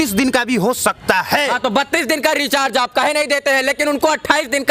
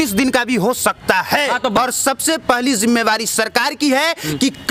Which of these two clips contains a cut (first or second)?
second